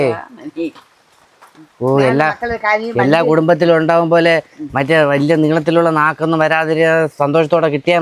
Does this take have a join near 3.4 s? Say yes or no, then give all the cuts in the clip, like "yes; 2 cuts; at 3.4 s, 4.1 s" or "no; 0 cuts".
no; 0 cuts